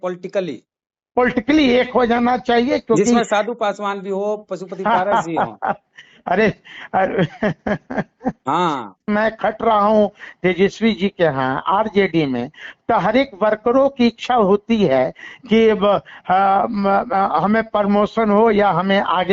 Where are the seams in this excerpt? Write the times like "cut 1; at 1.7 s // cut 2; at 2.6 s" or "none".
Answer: cut 1; at 9.1 s